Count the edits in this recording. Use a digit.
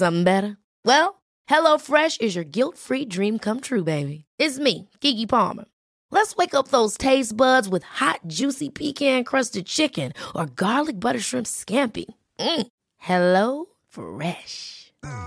0